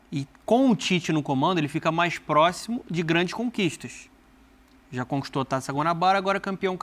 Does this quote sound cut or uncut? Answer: uncut